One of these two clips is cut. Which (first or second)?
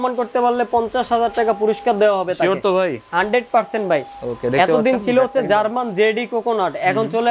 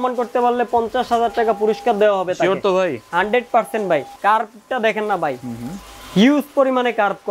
second